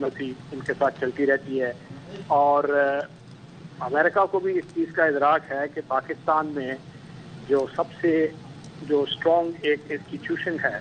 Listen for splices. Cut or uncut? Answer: uncut